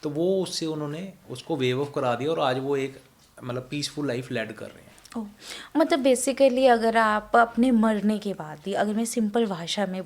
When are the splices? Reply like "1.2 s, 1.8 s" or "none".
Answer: none

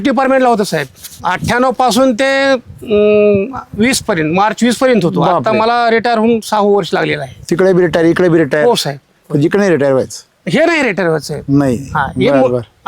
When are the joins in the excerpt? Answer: 1.2 s

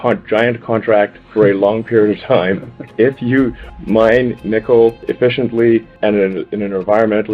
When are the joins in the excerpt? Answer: 5.0 s, 5.9 s

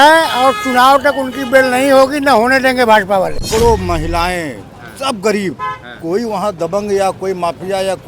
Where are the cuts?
3.4 s

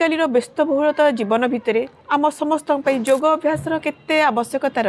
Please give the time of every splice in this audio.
2.0 s

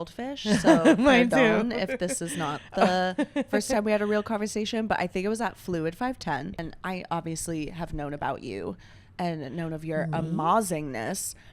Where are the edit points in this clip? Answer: 6.6 s

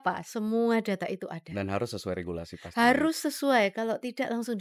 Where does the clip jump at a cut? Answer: none

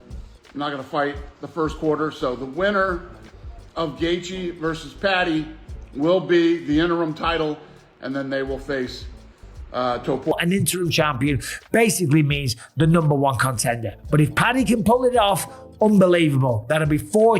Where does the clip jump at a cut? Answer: 10.3 s

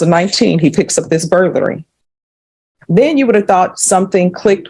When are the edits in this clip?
none

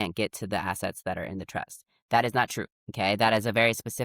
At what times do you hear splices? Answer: 2.8 s

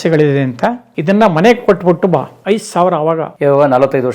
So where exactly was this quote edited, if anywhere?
0.9 s, 2.3 s, 3.3 s

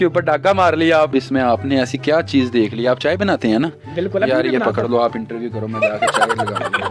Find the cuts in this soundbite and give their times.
1.1 s

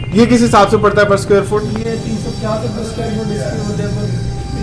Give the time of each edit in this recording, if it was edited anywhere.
none

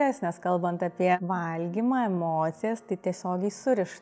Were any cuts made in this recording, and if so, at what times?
1.2 s

